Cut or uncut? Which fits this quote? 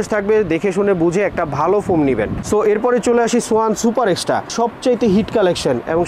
cut